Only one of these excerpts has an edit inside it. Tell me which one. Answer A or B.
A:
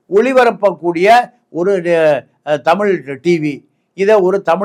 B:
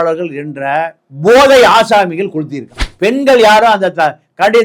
B